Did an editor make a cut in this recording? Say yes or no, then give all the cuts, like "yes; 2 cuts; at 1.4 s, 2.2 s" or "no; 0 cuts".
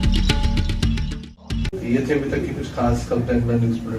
no; 0 cuts